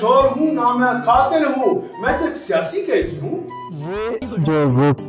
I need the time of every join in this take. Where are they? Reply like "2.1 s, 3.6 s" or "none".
3.9 s